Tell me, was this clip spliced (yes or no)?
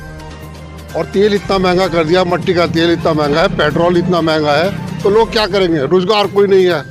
no